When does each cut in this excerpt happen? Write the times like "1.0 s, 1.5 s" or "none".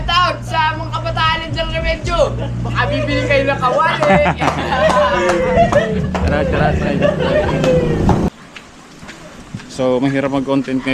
8.3 s